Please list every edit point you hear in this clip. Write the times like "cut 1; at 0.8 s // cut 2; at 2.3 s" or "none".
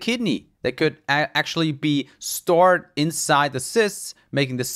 none